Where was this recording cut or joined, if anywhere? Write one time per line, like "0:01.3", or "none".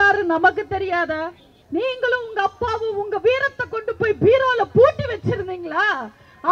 0:01.6